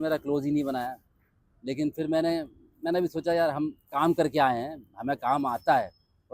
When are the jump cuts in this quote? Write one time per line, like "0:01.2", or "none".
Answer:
none